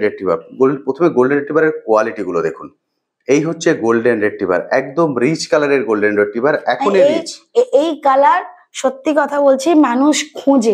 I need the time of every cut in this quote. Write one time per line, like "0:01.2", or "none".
none